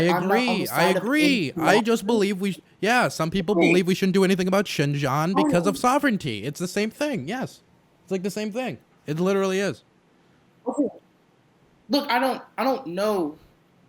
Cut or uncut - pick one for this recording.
uncut